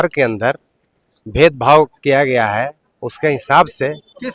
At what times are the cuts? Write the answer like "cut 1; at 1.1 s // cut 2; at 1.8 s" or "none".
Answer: none